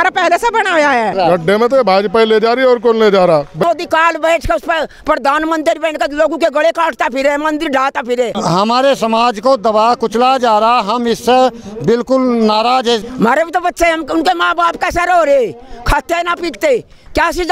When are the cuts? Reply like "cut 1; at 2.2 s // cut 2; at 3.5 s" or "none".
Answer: cut 1; at 1.1 s // cut 2; at 3.6 s // cut 3; at 8.4 s // cut 4; at 13.0 s